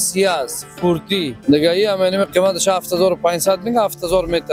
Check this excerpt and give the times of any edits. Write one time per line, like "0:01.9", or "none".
0:01.4